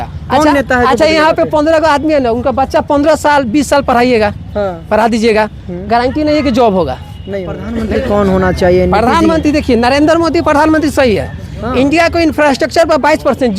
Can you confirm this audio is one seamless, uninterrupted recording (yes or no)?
no